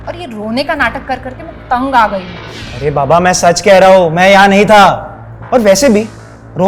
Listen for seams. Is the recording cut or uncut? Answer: uncut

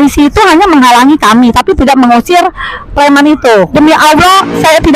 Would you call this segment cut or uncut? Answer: cut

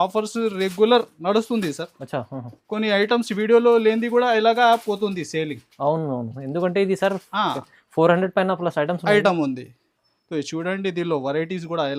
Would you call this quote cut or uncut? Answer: uncut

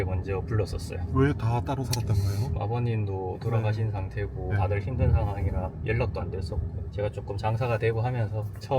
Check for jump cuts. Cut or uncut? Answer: cut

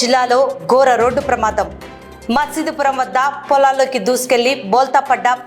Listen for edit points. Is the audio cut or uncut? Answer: uncut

